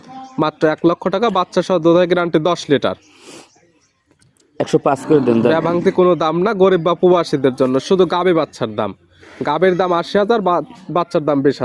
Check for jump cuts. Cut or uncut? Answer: uncut